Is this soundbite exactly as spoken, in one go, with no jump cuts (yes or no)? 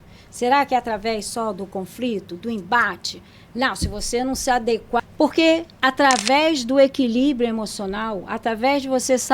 no